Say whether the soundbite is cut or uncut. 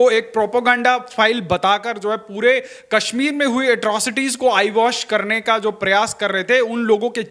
uncut